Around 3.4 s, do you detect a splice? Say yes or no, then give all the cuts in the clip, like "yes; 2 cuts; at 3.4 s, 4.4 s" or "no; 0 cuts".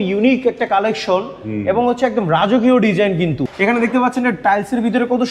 yes; 1 cut; at 3.4 s